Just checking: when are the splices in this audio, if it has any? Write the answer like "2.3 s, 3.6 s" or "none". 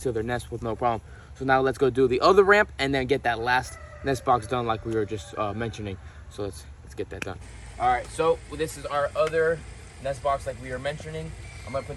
none

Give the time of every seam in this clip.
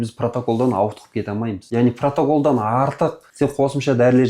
1.6 s, 3.2 s

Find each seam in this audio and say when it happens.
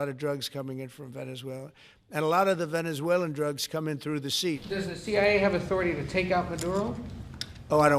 4.6 s

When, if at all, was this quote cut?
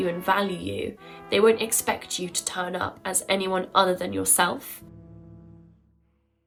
none

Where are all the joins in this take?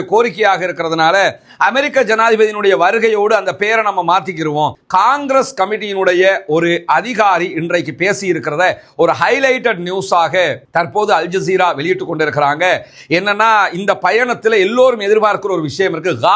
4.8 s

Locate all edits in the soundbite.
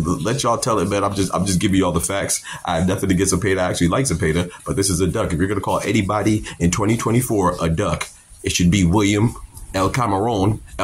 none

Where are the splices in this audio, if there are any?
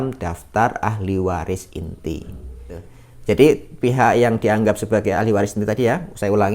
2.9 s

